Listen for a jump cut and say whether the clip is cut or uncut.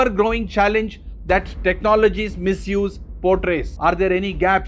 uncut